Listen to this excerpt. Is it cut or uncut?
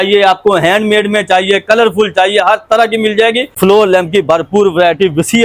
cut